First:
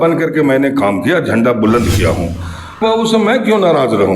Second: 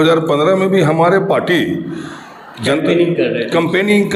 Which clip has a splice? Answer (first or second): first